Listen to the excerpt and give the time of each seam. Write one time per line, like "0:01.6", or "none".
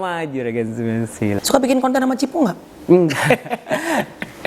0:01.4